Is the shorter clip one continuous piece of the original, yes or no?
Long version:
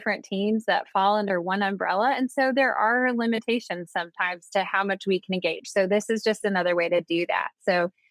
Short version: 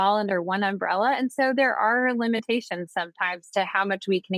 yes